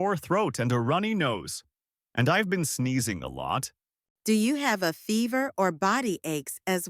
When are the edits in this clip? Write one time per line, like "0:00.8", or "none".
none